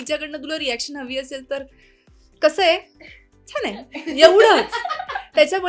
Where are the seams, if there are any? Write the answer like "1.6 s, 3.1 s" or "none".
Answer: none